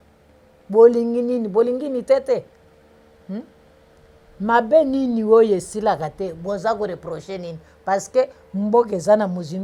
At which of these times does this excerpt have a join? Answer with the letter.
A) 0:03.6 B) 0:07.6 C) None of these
C